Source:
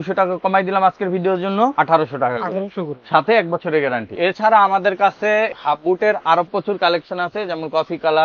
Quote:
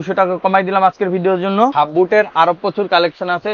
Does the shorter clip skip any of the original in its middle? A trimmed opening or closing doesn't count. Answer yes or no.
yes